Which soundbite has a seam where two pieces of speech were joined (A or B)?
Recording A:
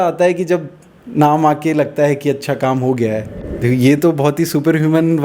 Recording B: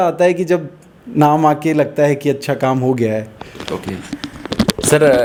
A